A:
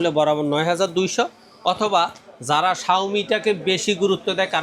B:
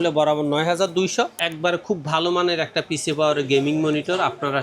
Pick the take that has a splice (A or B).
B